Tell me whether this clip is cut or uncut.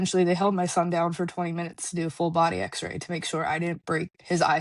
uncut